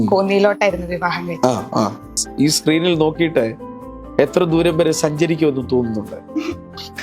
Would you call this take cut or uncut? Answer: cut